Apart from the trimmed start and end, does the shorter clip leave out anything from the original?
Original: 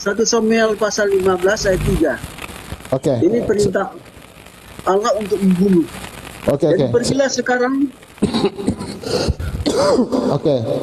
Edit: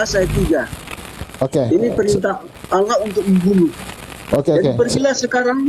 yes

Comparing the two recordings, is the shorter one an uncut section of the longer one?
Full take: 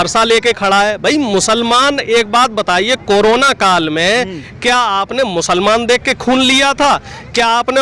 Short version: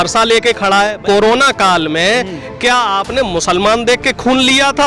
no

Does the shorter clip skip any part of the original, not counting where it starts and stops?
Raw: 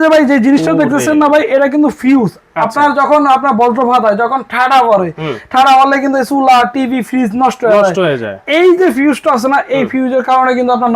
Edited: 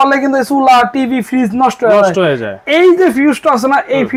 no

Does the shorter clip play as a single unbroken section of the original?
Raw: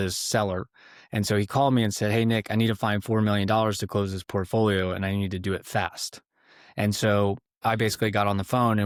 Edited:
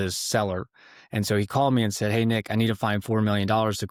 yes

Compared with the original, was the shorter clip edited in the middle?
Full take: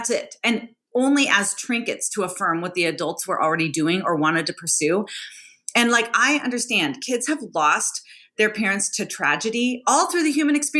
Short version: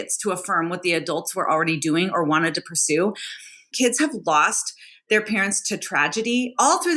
yes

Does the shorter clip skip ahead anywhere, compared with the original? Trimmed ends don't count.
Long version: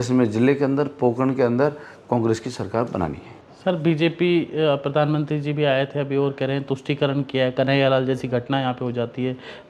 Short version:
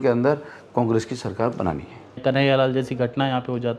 yes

